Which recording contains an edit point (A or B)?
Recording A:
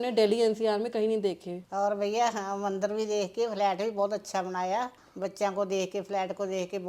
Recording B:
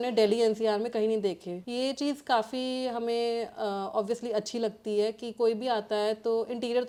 A